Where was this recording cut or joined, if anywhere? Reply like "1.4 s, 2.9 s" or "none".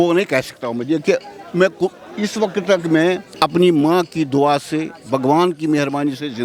none